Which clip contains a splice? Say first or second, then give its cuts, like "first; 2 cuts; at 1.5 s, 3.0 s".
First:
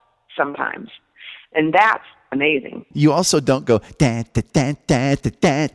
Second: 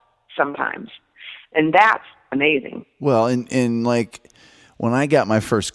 first; 1 cut; at 2.9 s